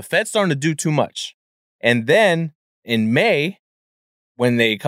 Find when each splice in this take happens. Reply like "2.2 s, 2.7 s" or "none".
1.6 s